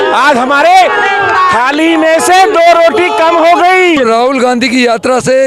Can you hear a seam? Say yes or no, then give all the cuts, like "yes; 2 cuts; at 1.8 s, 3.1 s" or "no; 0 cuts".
yes; 1 cut; at 4.0 s